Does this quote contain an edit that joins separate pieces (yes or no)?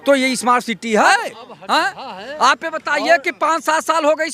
yes